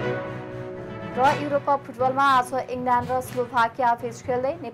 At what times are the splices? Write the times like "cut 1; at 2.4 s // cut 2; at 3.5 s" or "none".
cut 1; at 0.9 s